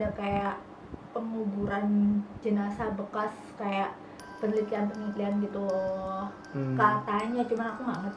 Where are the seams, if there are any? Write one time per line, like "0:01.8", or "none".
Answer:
none